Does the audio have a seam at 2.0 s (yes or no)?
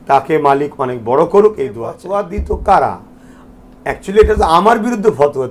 yes